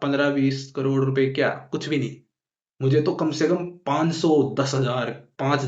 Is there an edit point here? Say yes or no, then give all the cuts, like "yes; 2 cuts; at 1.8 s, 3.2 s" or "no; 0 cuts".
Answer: no; 0 cuts